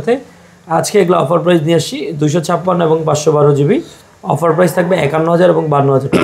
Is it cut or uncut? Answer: uncut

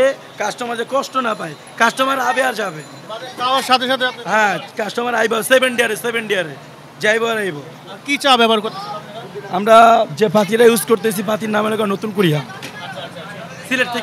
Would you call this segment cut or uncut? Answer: uncut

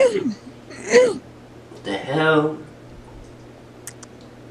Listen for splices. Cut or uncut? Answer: uncut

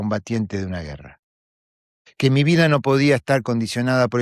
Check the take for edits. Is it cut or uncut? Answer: uncut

